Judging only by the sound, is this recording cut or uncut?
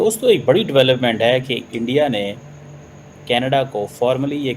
cut